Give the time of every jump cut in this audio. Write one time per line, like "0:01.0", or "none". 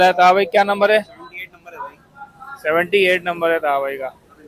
none